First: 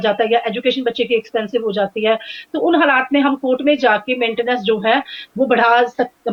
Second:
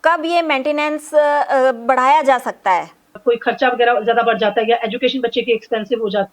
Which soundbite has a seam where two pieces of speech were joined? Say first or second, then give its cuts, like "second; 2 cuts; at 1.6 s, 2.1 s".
second; 1 cut; at 3.2 s